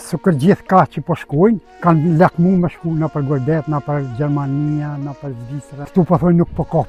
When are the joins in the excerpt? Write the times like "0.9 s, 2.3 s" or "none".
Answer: 1.7 s, 5.8 s